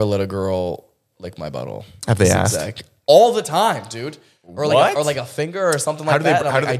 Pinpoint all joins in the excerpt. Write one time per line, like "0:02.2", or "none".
none